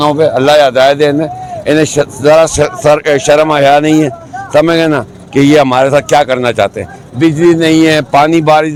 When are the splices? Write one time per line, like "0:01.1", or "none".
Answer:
none